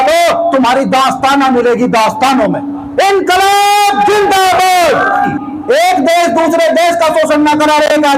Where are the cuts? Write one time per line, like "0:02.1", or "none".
none